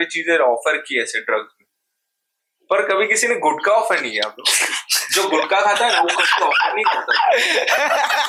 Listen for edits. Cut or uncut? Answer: uncut